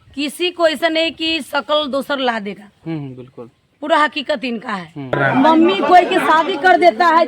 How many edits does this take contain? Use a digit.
1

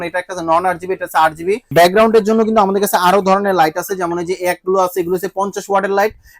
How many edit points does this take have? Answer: 1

